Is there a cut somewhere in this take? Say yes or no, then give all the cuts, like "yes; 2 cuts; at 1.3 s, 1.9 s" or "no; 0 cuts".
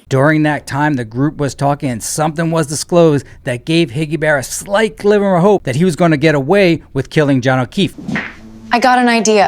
yes; 1 cut; at 5.7 s